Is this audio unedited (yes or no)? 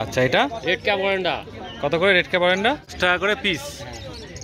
no